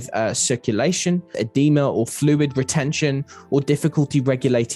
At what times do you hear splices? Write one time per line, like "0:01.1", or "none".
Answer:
0:01.3